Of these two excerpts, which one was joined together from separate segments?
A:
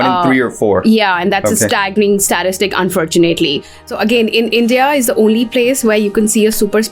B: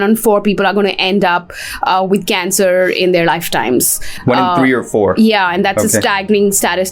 A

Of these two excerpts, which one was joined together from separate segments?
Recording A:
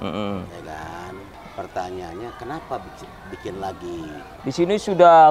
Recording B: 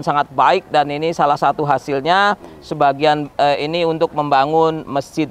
A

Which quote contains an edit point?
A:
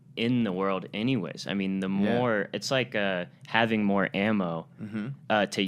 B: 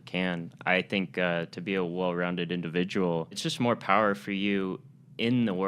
B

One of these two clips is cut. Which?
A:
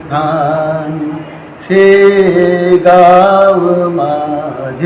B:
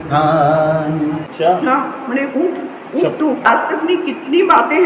B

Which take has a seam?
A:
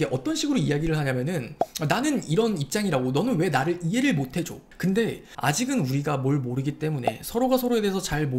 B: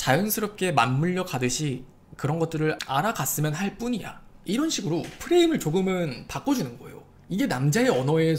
A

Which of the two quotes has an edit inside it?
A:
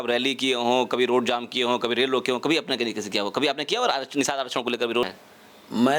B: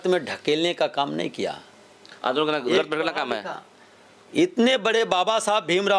A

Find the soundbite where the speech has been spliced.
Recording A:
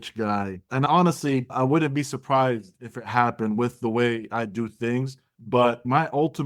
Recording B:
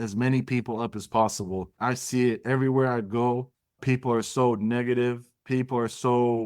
B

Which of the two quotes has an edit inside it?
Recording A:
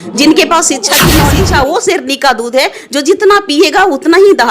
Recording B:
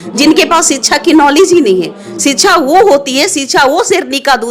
A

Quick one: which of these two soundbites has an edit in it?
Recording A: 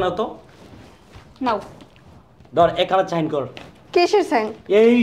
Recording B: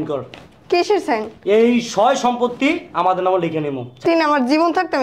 B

